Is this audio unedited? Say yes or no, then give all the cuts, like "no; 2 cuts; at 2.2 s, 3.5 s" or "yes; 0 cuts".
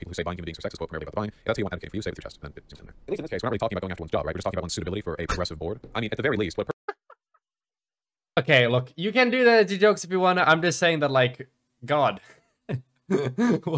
no; 1 cut; at 8.4 s